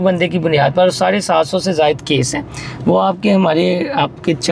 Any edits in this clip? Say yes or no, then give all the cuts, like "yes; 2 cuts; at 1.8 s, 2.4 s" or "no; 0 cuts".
no; 0 cuts